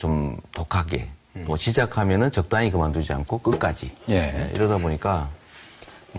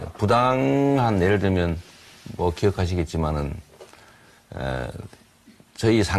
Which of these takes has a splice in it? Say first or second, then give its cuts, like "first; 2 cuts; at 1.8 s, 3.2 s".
first; 1 cut; at 1.9 s